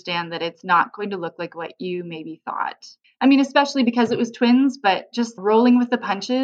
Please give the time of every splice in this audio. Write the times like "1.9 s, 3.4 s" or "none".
none